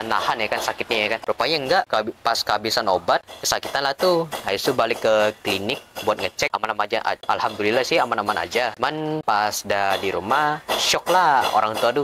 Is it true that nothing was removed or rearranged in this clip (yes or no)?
no